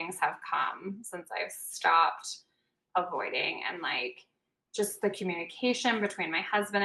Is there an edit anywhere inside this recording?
no; 0 cuts

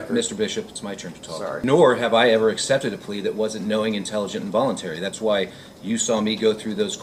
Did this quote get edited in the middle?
no; 0 cuts

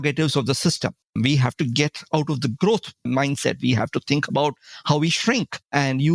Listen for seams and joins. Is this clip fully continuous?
no; 2 cuts; at 1.2 s, 3.1 s

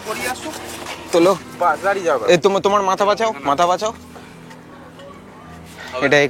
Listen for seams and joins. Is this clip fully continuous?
yes; 0 cuts

